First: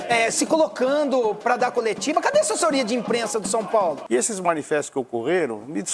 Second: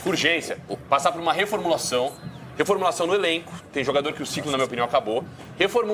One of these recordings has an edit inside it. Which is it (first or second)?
first